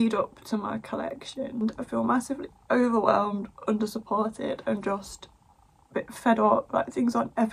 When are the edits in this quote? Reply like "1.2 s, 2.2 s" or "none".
1.6 s